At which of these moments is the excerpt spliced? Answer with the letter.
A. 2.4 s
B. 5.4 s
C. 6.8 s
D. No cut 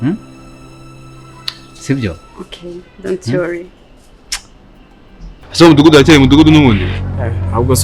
B